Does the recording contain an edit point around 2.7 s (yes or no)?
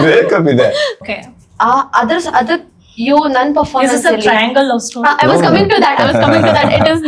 no